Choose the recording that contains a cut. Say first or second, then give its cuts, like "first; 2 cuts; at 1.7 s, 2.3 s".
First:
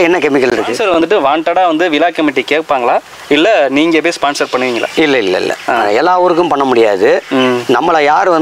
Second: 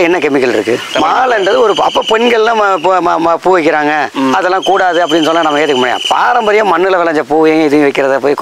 first; 1 cut; at 1.0 s